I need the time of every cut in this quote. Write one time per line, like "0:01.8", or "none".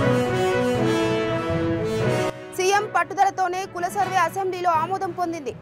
0:02.4